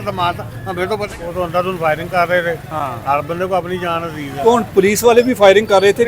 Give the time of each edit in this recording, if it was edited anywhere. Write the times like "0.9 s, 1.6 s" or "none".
1.1 s

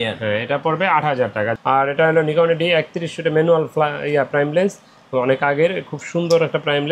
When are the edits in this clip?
1.5 s

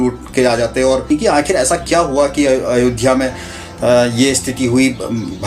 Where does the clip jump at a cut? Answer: 1.0 s

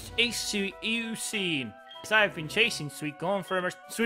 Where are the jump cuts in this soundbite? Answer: 2.0 s

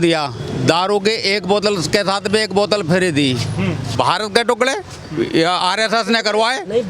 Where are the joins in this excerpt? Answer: 3.9 s

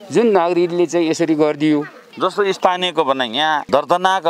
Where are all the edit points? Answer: 2.0 s

